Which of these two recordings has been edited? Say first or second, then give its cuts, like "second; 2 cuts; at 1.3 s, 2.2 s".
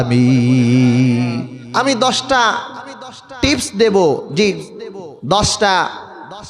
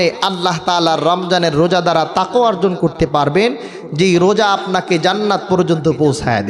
first; 1 cut; at 1.6 s